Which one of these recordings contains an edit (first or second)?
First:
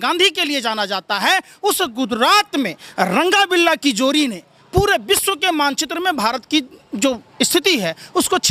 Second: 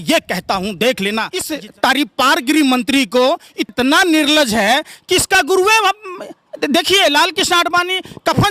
second